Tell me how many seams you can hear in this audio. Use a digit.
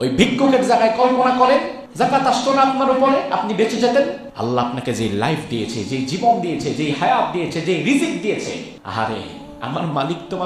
3